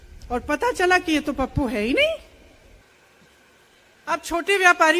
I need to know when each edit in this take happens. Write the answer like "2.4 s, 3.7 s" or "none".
2.8 s